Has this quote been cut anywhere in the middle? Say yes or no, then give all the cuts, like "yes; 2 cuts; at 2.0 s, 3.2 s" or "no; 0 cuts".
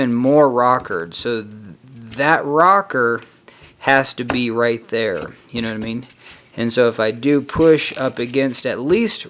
no; 0 cuts